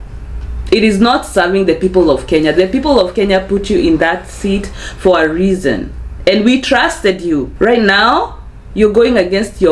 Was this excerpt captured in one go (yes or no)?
no